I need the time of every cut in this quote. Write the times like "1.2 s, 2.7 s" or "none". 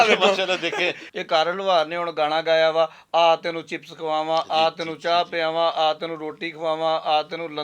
1.0 s